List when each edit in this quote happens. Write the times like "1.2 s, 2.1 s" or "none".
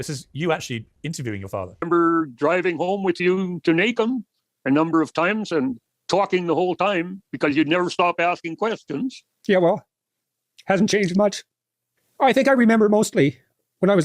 1.8 s